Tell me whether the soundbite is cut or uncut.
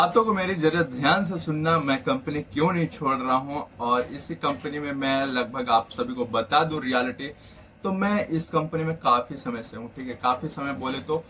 uncut